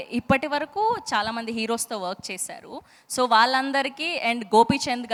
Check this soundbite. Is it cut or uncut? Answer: uncut